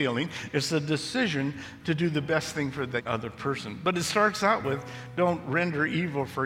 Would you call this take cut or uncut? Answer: cut